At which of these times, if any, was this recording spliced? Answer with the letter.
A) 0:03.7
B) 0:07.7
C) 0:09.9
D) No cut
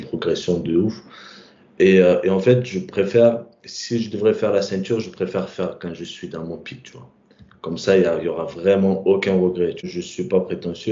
C